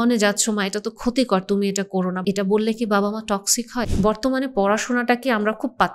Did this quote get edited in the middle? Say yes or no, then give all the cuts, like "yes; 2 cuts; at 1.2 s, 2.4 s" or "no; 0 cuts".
yes; 2 cuts; at 2.2 s, 3.8 s